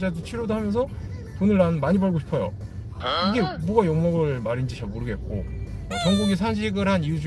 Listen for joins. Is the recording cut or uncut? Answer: uncut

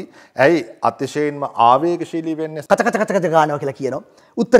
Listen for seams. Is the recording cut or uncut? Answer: cut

